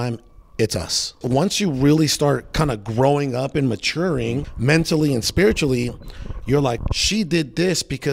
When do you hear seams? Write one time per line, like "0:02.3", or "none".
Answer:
0:01.2
0:04.5
0:06.8